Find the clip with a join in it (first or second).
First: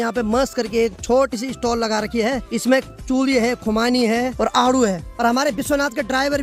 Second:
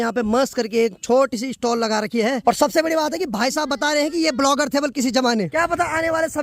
second